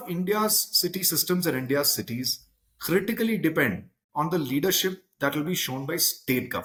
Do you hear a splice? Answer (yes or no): no